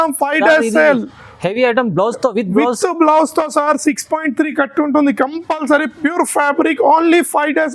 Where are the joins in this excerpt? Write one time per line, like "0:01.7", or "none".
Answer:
none